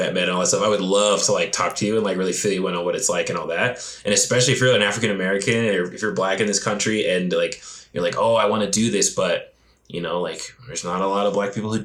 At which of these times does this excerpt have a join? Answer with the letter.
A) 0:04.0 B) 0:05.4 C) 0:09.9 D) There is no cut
D